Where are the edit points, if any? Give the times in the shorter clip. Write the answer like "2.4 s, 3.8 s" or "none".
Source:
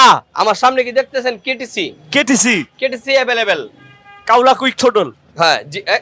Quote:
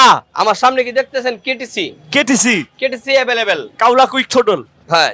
3.7 s